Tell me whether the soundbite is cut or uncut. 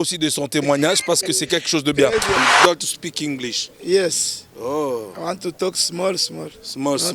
cut